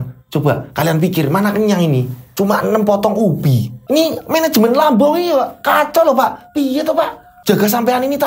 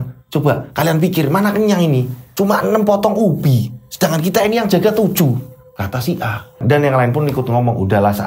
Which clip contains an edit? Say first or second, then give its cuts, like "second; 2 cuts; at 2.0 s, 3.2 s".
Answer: first; 2 cuts; at 3.7 s, 7.3 s